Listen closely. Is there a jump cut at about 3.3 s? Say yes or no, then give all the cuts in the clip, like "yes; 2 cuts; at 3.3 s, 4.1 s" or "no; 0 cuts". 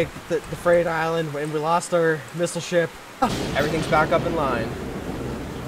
yes; 1 cut; at 3.3 s